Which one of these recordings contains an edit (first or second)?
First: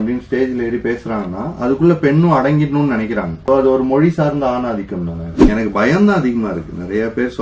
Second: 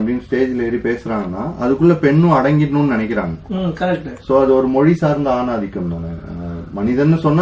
first